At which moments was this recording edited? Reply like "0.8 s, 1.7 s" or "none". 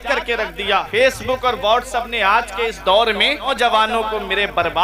0.9 s, 3.5 s